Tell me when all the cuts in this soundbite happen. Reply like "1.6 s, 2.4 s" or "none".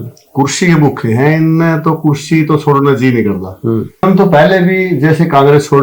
4.0 s